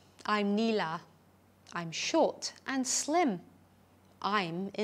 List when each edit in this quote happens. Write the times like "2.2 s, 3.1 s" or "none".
none